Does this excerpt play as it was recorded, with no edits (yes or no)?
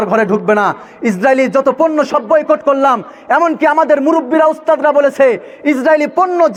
yes